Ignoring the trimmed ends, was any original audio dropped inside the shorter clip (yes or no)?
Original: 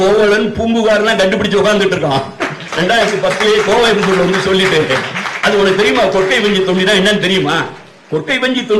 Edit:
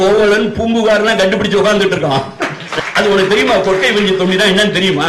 yes